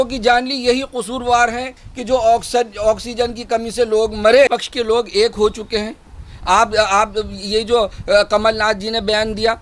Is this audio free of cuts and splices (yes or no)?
no